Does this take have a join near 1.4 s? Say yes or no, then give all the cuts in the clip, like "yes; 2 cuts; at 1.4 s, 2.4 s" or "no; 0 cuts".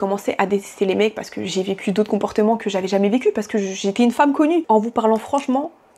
no; 1 cut; at 4.6 s